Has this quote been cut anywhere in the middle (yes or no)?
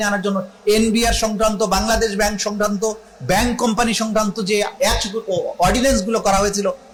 no